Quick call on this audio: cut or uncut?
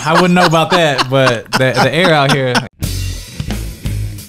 cut